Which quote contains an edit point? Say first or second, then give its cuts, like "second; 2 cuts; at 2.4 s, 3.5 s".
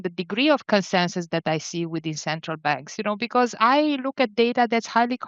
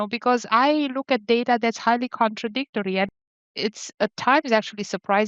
second; 1 cut; at 3.3 s